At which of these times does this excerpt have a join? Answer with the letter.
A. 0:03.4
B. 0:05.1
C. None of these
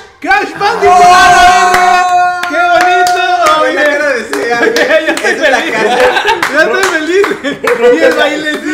C